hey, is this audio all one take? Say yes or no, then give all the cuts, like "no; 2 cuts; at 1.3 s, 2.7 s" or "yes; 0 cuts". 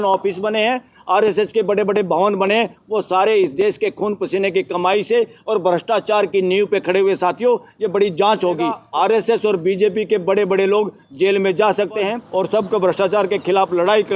no; 2 cuts; at 8.8 s, 12.2 s